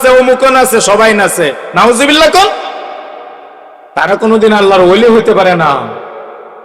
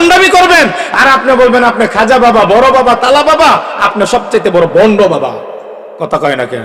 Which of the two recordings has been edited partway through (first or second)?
first